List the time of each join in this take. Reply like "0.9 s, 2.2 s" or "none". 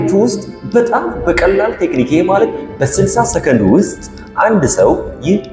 none